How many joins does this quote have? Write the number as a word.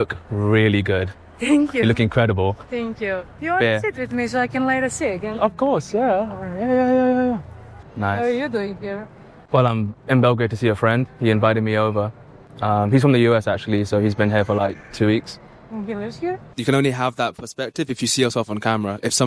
three